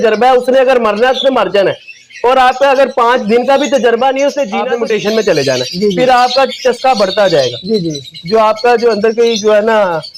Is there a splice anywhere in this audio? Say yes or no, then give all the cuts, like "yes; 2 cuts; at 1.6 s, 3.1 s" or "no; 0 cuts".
yes; 1 cut; at 4.6 s